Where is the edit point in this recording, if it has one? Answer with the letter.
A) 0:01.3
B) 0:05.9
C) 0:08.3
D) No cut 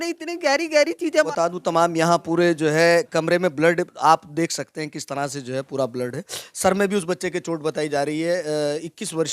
A